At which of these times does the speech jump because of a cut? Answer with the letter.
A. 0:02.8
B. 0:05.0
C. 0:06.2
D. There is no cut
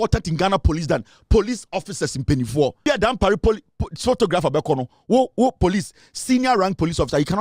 A